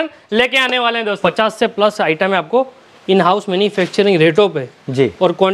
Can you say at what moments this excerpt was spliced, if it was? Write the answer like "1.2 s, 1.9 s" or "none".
1.2 s

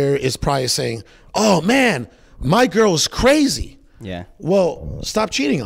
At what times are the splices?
none

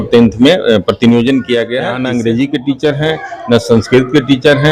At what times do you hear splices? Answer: 1.9 s

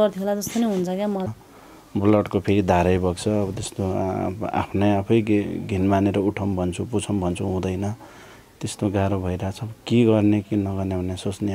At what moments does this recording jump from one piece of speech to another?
1.3 s

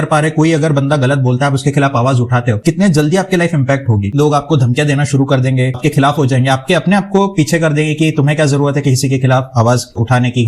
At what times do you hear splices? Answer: 2.6 s, 4.1 s, 5.8 s

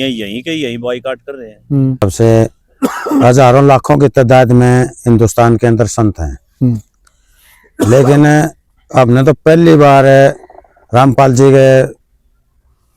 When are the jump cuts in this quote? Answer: 2.0 s

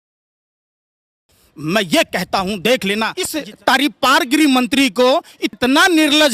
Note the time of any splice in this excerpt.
3.2 s, 5.4 s

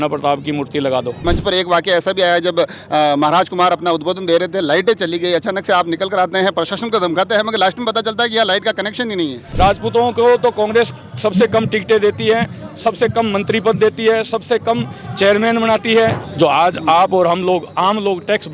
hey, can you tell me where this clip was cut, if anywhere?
1.2 s, 9.4 s, 16.2 s

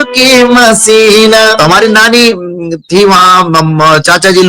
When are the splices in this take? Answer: 1.6 s

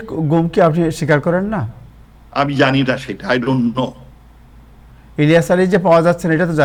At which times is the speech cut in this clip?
none

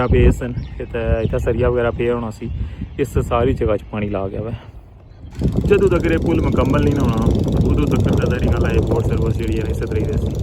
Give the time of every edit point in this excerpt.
5.3 s

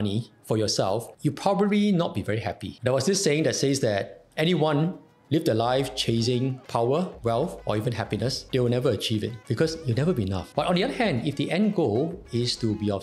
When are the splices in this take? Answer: 4.3 s, 10.5 s

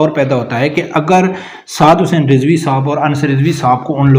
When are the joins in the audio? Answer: none

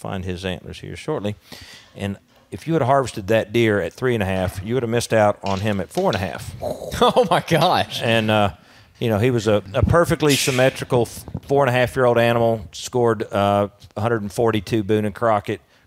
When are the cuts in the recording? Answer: 9.7 s

